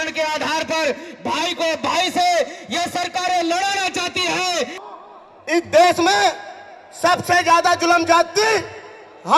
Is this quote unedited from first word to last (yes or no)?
no